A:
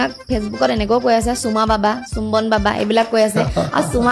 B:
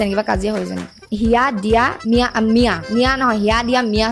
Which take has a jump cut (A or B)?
B